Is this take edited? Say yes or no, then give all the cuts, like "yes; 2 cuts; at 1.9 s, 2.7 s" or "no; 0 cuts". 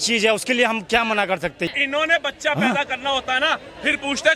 yes; 1 cut; at 1.7 s